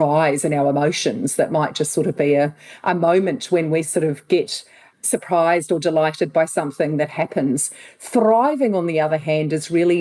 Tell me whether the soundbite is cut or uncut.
cut